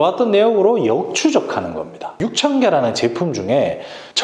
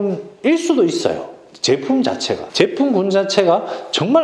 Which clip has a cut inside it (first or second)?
first